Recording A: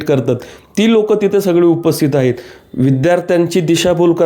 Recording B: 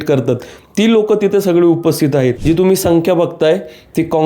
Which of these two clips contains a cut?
B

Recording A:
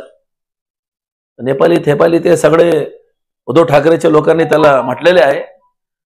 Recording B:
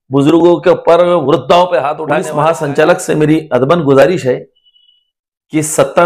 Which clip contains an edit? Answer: B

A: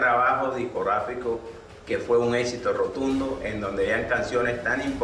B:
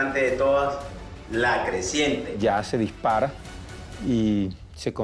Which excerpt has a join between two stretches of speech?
B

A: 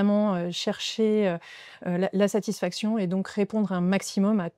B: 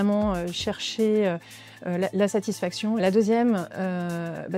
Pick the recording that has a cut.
B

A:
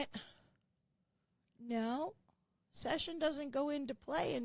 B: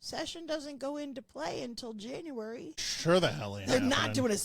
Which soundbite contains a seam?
B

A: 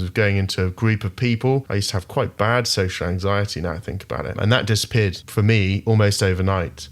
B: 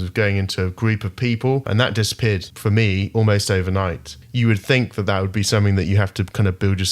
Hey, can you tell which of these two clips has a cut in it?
B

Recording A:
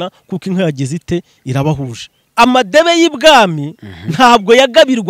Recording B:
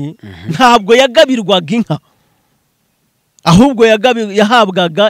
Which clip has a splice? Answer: A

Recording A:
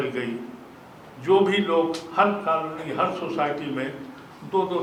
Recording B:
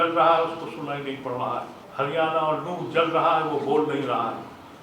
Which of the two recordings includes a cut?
B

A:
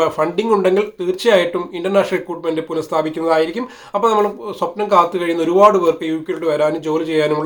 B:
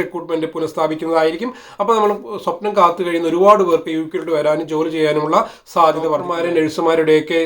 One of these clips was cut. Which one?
B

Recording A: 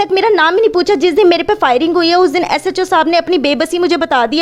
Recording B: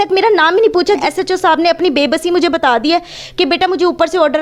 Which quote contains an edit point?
B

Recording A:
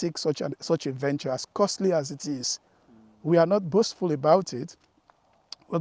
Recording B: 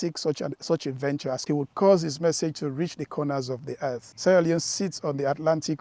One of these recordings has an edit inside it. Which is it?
B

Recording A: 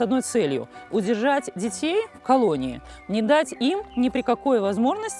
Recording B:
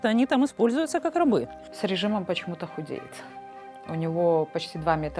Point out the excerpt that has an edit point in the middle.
B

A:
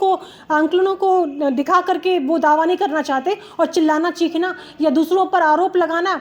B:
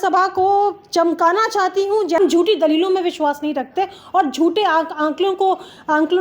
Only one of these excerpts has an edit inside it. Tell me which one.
B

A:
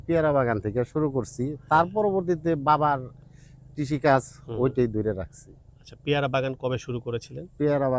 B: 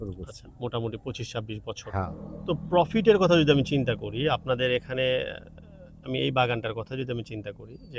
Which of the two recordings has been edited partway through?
B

